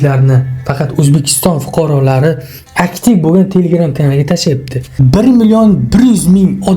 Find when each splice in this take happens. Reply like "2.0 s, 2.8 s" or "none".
4.9 s